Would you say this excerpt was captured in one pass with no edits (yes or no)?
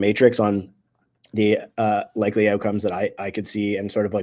yes